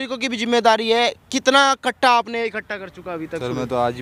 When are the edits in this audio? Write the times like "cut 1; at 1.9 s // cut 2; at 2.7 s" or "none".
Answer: none

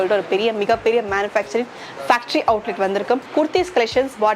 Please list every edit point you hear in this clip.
cut 1; at 3.3 s

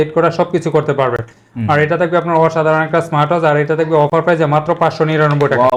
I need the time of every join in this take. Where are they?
none

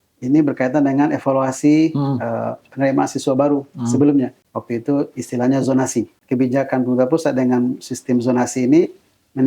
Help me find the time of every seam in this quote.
cut 1; at 4.4 s // cut 2; at 6.1 s

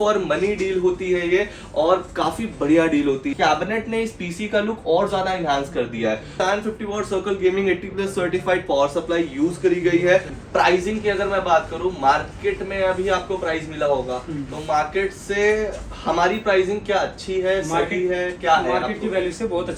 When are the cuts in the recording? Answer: cut 1; at 3.3 s // cut 2; at 6.3 s // cut 3; at 10.4 s

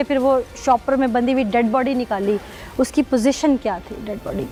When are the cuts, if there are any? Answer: none

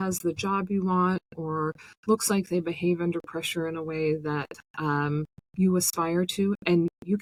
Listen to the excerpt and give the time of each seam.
none

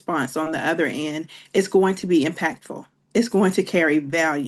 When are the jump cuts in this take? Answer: none

